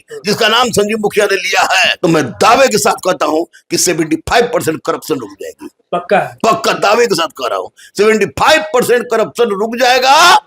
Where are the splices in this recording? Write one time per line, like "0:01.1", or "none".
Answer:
0:01.9